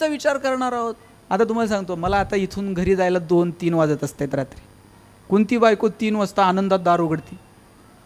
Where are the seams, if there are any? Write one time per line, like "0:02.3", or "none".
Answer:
0:01.1